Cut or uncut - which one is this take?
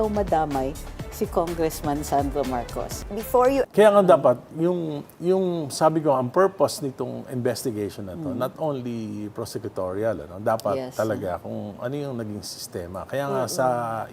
cut